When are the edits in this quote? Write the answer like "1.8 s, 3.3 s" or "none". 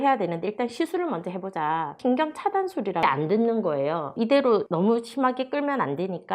1.9 s, 3.0 s, 4.5 s